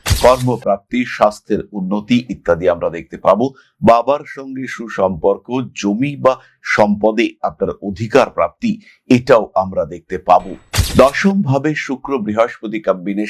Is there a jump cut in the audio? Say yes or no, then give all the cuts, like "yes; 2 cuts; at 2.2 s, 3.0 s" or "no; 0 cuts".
yes; 1 cut; at 10.7 s